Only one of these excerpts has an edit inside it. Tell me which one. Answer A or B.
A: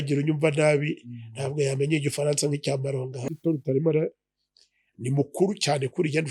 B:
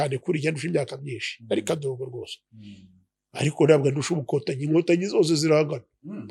A